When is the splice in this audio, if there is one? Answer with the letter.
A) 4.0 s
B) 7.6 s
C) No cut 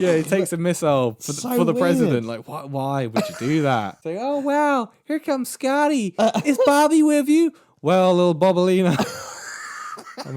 A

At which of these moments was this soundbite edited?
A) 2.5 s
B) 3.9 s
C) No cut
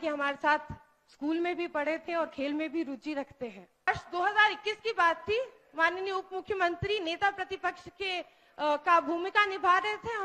B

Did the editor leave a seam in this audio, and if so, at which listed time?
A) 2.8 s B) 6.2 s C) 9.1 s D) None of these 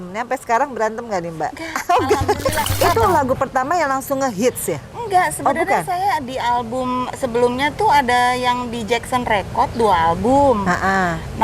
A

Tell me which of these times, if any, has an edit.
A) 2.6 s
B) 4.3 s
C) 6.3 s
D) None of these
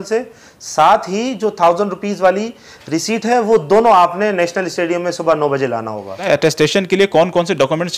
C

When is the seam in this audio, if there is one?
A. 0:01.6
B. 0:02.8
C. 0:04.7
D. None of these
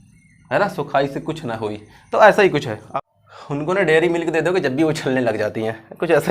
B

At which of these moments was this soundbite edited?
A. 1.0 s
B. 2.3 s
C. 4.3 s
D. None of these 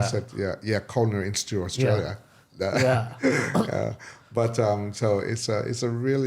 D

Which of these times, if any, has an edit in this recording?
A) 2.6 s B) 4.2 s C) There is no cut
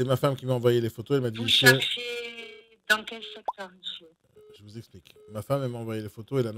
B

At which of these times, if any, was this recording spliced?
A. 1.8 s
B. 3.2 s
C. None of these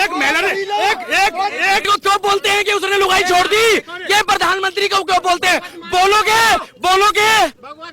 A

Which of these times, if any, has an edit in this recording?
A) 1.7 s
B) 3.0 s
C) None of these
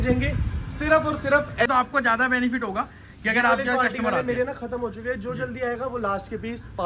A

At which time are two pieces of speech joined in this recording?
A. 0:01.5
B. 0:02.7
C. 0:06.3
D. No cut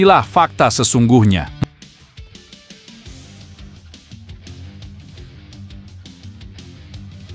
A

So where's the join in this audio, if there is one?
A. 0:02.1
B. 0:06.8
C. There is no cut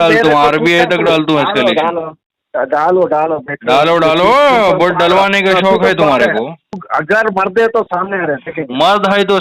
B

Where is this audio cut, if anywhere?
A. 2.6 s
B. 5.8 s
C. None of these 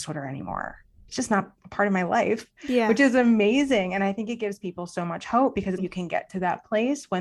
B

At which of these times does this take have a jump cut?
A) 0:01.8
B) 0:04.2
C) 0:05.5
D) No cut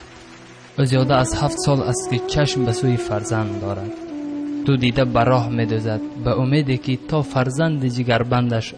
B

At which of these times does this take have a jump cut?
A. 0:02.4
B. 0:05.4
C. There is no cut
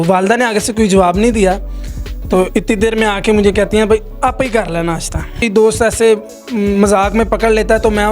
B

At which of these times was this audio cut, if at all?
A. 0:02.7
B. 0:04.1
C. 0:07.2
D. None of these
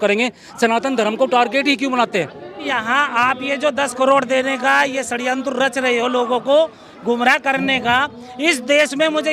A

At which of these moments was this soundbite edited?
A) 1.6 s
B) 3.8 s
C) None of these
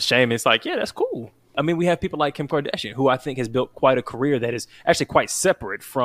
A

